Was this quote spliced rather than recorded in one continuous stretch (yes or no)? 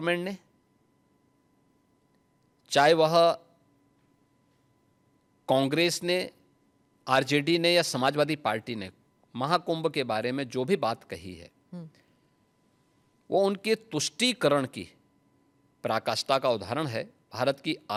no